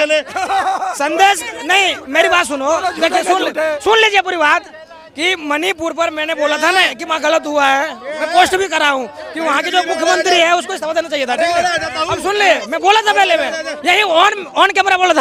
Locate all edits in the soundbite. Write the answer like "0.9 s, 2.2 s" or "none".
none